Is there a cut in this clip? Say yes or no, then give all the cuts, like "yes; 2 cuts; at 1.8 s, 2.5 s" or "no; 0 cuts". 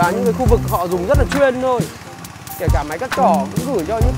no; 0 cuts